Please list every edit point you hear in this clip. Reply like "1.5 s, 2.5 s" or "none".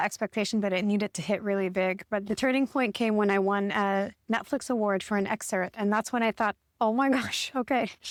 none